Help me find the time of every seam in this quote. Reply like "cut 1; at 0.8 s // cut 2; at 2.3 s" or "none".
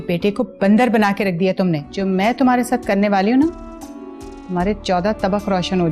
cut 1; at 1.9 s